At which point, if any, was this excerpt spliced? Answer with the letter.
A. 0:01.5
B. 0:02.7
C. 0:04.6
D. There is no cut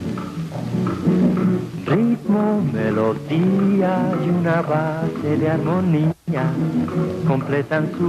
B